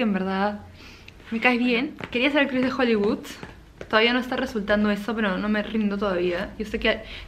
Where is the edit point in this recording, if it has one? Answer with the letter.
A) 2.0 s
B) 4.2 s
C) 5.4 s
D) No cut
A